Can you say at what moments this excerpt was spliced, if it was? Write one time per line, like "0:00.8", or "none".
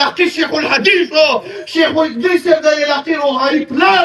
none